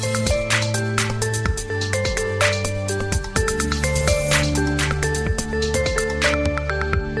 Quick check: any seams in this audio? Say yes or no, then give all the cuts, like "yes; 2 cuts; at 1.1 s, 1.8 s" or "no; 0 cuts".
no; 0 cuts